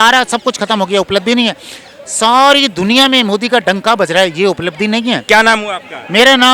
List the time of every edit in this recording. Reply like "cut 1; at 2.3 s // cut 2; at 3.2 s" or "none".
cut 1; at 5.2 s